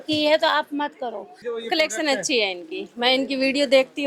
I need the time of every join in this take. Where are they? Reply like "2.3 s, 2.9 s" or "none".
1.4 s